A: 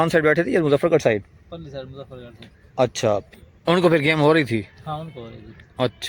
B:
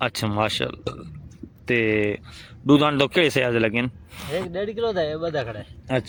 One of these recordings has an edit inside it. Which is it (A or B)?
A